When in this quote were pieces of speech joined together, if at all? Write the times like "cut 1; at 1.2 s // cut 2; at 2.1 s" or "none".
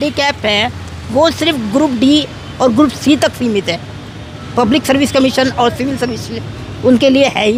none